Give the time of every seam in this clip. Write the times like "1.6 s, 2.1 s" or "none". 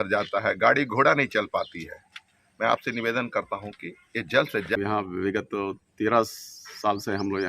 4.8 s